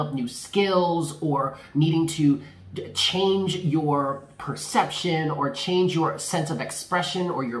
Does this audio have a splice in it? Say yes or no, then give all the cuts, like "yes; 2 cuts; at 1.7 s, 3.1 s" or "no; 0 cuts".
no; 0 cuts